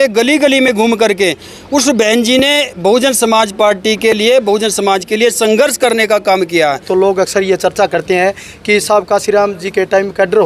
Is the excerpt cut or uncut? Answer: cut